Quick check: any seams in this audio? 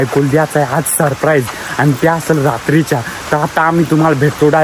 no; 0 cuts

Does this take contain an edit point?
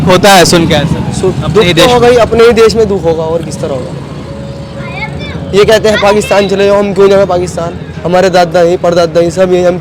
no; 0 cuts

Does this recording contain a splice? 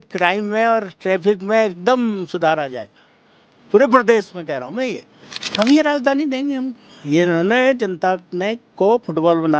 yes; 1 cut; at 5.4 s

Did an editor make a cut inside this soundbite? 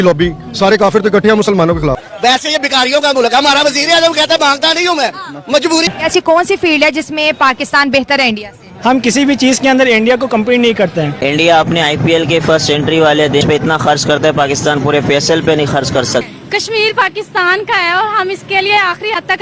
yes; 5 cuts; at 2.0 s, 5.8 s, 11.2 s, 13.4 s, 16.3 s

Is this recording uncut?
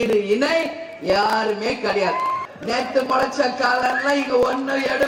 no; 1 cut; at 2.5 s

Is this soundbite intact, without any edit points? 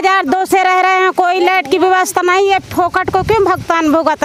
yes; 0 cuts

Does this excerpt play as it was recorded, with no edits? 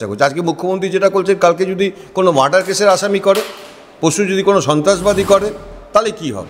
yes; 0 cuts

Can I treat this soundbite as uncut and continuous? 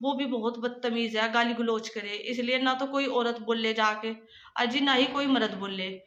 yes; 0 cuts

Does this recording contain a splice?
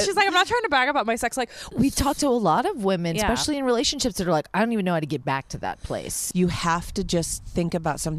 yes; 2 cuts; at 1.6 s, 6.1 s

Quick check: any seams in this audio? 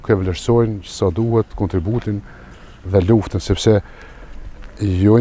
no; 0 cuts

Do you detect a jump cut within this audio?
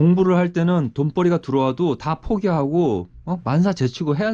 no; 0 cuts

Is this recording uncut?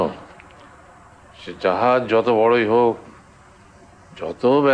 yes; 0 cuts

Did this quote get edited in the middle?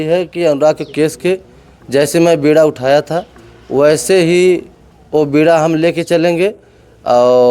no; 0 cuts

